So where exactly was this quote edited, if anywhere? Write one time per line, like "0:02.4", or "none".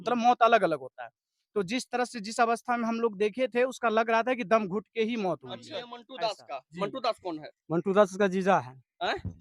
0:06.0

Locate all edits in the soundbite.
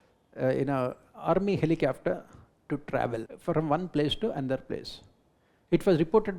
0:03.3

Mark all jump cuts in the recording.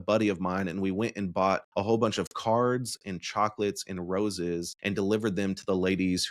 0:01.7
0:04.7

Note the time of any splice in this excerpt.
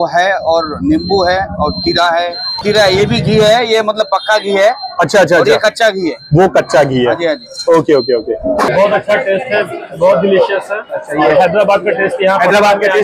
0:02.6
0:08.3

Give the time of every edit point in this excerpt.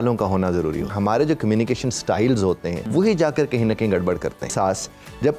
0:00.9
0:02.8
0:04.5

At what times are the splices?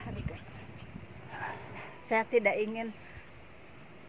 0:01.9

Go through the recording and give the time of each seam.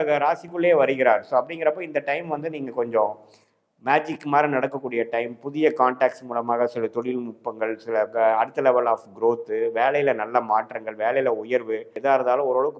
0:11.9

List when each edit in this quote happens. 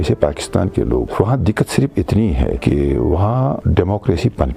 0:01.1
0:02.6
0:03.6

